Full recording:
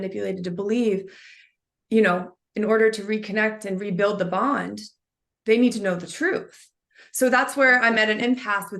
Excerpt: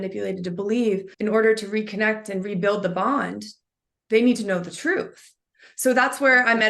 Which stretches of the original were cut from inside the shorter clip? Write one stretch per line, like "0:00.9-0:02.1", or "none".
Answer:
0:01.1-0:02.5